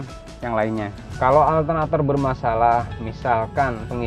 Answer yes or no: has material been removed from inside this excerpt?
yes